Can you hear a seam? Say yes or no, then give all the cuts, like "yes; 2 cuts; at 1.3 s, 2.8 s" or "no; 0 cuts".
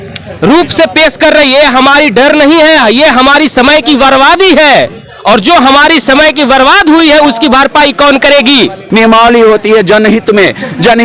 yes; 1 cut; at 8.8 s